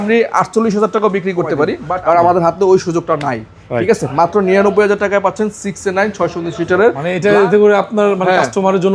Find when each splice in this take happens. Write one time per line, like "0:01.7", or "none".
0:01.9
0:07.0